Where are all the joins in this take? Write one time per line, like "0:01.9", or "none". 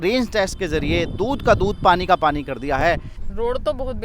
0:03.1